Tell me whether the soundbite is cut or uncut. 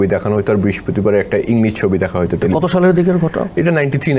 uncut